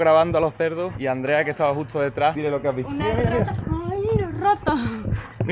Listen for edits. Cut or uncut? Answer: cut